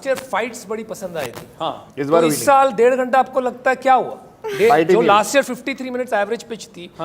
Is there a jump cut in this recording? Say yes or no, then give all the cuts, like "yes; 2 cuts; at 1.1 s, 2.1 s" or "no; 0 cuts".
no; 0 cuts